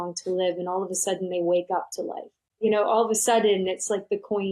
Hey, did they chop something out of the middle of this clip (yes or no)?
yes